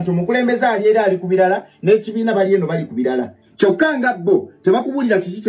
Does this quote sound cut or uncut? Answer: cut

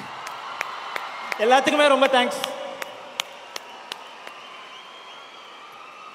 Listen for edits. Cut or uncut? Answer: uncut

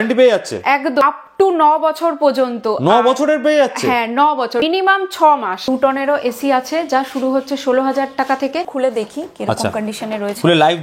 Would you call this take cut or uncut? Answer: cut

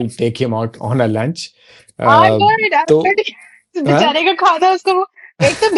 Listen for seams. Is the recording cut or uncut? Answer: uncut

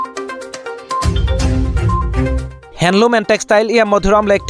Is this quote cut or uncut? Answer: cut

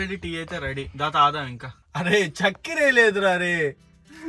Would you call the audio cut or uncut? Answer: uncut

